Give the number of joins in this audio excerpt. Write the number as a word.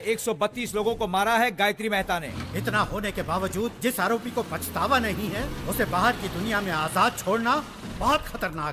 one